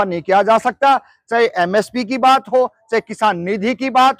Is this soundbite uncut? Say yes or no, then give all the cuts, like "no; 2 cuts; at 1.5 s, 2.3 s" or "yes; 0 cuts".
yes; 0 cuts